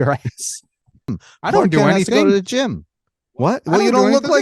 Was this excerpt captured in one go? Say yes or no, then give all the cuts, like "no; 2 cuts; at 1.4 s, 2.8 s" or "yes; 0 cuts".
no; 1 cut; at 1.2 s